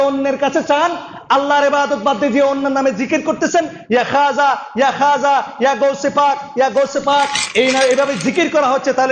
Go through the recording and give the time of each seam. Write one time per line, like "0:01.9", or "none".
0:07.6